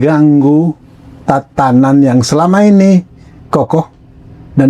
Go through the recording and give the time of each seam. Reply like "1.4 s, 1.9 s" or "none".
3.4 s